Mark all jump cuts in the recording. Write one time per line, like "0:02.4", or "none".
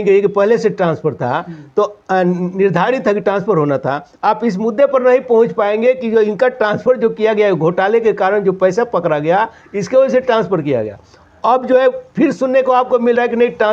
none